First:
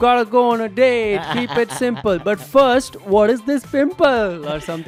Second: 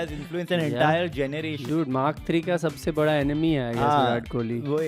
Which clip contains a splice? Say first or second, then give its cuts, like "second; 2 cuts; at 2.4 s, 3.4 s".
second; 1 cut; at 1.7 s